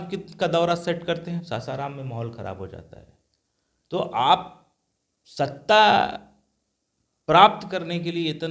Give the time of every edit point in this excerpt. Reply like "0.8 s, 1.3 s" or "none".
none